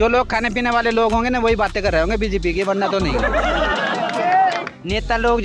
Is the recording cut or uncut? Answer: uncut